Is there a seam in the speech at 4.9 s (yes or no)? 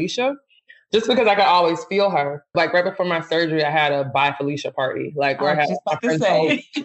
no